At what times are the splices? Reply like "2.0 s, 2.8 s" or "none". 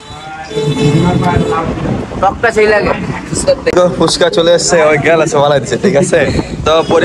3.7 s